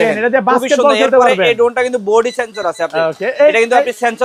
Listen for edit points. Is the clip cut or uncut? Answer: uncut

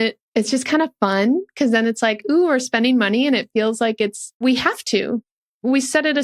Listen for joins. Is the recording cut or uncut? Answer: cut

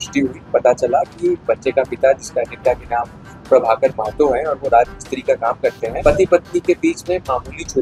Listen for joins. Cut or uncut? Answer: cut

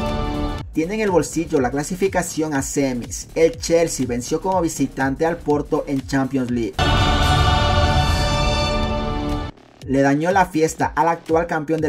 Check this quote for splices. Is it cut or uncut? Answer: cut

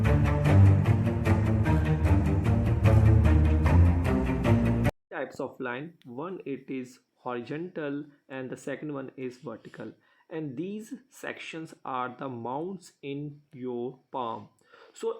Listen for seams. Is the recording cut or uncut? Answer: cut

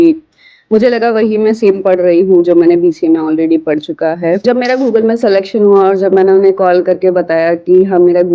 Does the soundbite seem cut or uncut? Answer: cut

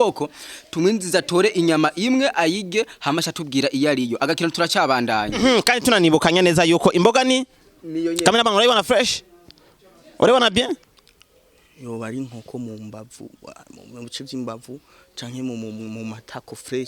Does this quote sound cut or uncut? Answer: cut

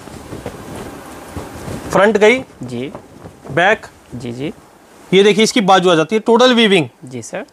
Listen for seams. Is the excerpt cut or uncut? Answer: uncut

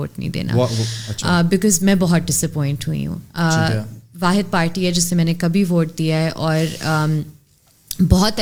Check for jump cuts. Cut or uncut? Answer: uncut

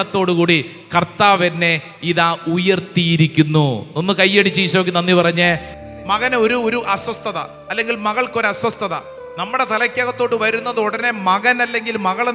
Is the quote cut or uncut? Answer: cut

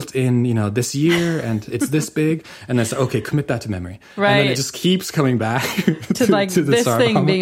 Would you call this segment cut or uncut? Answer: uncut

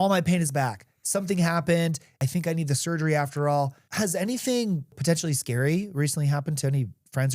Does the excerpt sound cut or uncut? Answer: cut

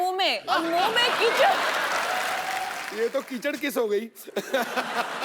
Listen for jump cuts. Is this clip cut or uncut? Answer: cut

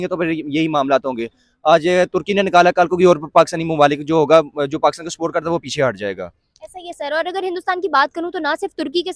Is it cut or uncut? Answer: uncut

